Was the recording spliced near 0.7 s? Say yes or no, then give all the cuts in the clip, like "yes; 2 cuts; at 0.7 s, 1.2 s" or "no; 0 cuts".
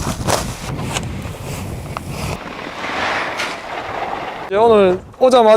yes; 3 cuts; at 0.7 s, 2.4 s, 4.4 s